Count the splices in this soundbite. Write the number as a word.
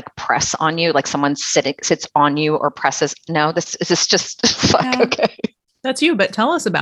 one